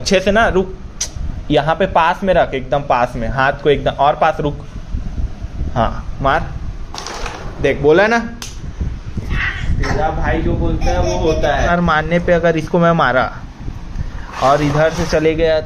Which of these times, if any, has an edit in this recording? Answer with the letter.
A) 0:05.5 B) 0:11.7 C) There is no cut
B